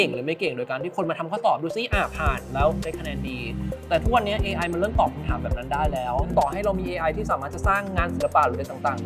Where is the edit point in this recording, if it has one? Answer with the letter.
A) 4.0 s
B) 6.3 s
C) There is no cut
B